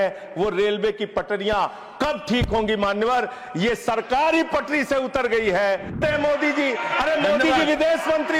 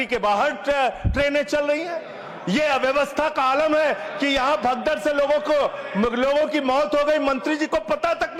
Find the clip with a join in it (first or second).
first